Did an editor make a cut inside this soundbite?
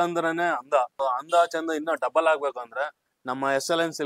yes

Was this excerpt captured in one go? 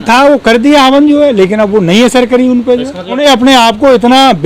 no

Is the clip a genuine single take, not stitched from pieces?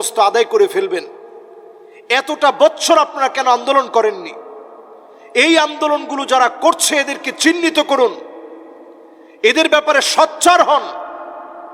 yes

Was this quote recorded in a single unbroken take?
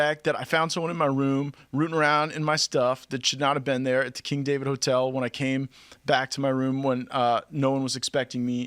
yes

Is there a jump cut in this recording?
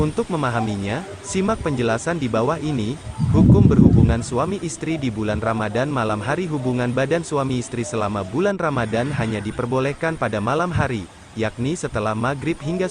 yes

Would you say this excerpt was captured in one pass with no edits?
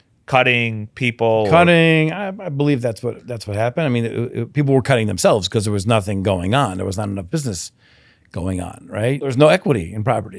no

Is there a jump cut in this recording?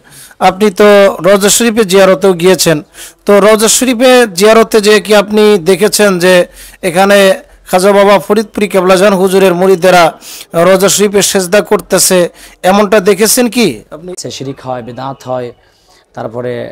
yes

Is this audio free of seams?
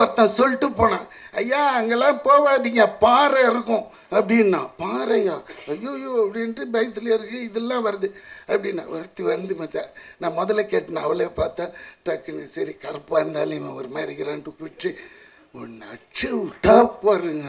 yes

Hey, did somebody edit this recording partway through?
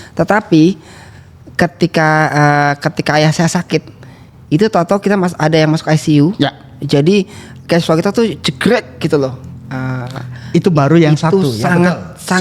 no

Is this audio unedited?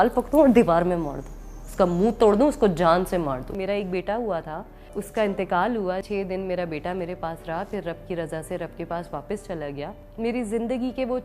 no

